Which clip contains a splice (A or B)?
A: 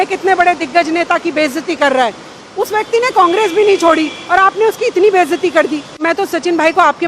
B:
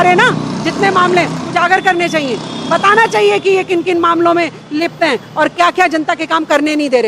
A